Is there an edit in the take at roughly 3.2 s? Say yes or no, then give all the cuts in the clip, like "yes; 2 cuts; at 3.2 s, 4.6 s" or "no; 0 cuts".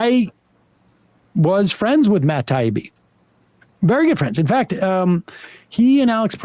no; 0 cuts